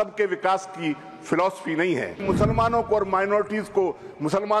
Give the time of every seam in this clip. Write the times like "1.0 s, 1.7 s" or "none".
2.2 s